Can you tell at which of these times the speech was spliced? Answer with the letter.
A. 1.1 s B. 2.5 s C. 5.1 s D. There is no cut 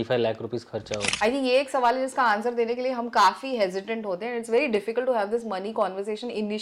A